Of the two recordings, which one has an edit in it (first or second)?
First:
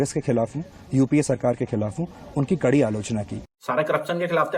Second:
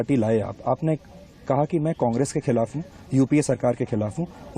first